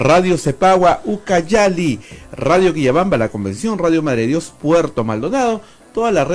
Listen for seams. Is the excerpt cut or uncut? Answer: uncut